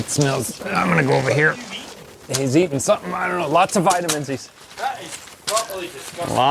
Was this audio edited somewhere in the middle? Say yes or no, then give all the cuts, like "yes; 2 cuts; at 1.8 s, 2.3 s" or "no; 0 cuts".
no; 0 cuts